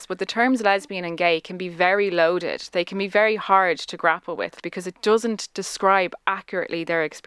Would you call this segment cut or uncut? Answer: cut